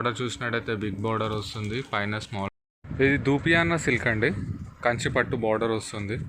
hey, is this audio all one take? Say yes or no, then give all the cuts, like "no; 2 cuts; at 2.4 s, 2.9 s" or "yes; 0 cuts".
no; 1 cut; at 2.5 s